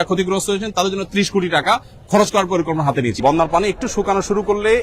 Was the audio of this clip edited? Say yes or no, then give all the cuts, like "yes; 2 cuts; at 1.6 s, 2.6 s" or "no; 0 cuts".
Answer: yes; 1 cut; at 3.2 s